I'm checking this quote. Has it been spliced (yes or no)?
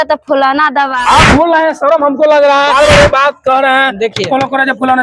yes